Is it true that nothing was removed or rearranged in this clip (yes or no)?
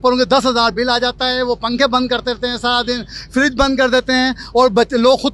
yes